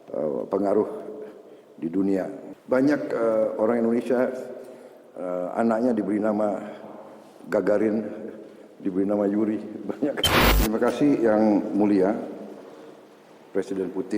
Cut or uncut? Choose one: cut